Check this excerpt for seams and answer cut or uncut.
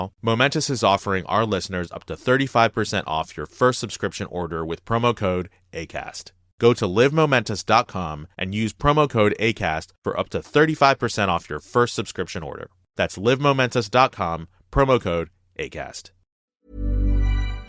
cut